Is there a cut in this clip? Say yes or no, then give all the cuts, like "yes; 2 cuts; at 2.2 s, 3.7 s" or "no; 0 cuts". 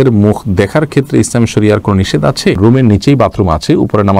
yes; 1 cut; at 2.6 s